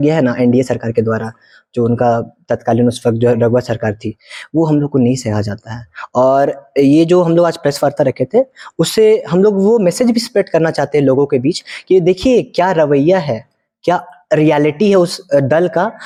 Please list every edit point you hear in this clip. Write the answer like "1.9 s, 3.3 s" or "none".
none